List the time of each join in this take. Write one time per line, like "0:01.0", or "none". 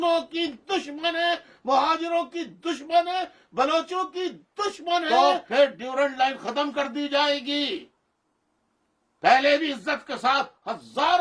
0:05.1